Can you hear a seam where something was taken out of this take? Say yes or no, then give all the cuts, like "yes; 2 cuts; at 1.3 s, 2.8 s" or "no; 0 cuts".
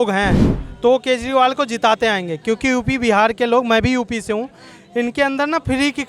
no; 0 cuts